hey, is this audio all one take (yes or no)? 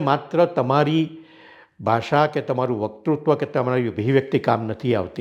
yes